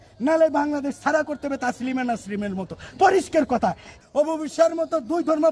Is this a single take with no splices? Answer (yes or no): no